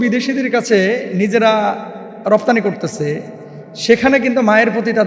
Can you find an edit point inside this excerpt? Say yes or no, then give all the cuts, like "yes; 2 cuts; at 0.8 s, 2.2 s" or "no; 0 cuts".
no; 0 cuts